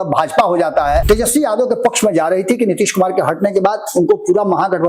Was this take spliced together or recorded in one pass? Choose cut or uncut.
cut